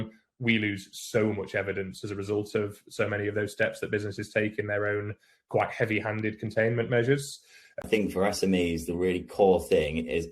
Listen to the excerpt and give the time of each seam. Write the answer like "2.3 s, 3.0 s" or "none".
7.8 s